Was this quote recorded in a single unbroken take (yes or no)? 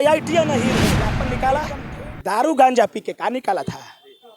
no